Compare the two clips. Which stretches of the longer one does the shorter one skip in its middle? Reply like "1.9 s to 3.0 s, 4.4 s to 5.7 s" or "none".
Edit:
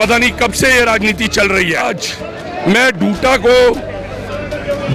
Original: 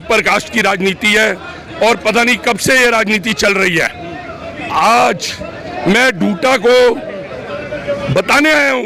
4.0 s to 5.1 s